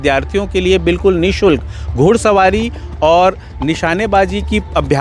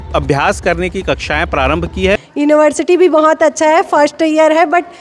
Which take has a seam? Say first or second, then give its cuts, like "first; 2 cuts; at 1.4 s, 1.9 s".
second; 1 cut; at 2.3 s